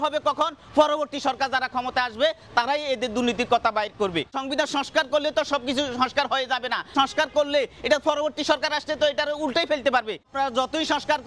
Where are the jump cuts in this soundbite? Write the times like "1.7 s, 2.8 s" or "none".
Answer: 4.4 s, 6.9 s, 10.3 s